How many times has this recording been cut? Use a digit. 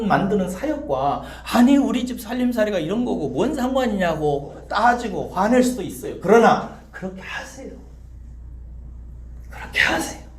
1